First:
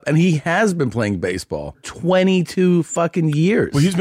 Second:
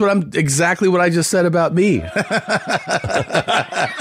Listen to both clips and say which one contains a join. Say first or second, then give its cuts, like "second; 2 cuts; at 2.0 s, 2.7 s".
first; 1 cut; at 1.9 s